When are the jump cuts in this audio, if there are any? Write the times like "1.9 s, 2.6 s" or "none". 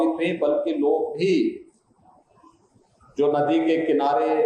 none